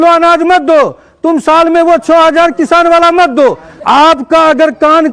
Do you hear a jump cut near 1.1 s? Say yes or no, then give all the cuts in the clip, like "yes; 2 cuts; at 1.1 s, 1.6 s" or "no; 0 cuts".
no; 1 cut; at 3.7 s